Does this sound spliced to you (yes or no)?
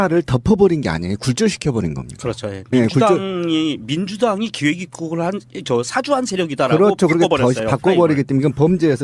yes